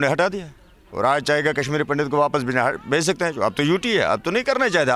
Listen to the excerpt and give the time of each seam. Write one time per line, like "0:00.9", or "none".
none